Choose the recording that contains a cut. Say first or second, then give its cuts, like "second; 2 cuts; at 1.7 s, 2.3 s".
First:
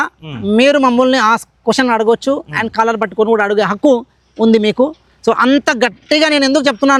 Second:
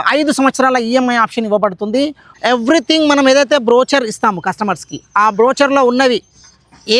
second; 1 cut; at 2.3 s